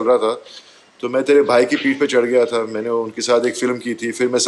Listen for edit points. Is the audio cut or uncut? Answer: uncut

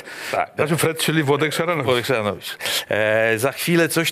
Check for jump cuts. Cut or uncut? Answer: uncut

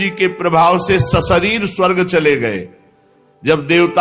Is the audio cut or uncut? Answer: uncut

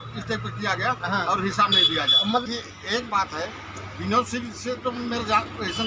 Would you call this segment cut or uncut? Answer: cut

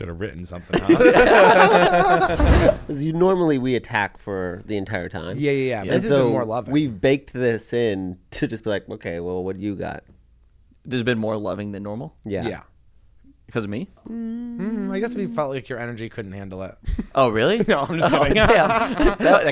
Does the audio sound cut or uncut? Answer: cut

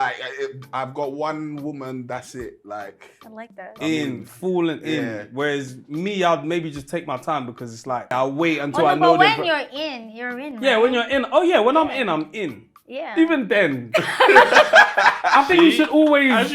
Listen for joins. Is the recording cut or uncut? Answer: cut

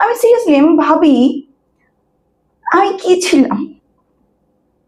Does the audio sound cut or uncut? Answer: uncut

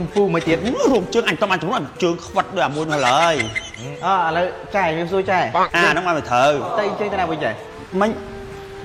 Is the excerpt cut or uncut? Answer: uncut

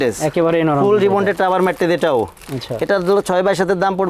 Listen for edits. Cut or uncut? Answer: uncut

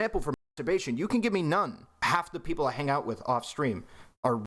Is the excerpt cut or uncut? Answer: cut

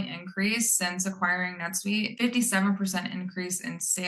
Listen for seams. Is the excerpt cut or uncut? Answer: cut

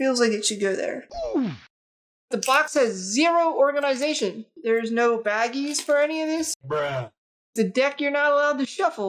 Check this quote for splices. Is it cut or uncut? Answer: cut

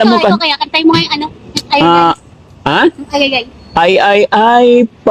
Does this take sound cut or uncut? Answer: uncut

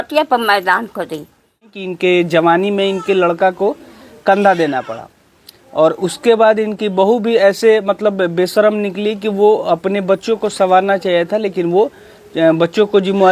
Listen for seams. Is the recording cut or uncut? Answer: cut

